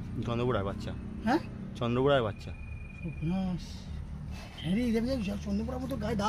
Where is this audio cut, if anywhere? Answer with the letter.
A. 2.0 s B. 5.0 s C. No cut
C